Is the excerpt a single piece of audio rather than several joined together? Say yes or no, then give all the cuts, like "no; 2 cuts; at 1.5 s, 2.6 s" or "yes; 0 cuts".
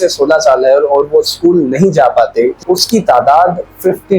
no; 1 cut; at 2.6 s